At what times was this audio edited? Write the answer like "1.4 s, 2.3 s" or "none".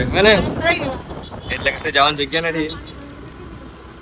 none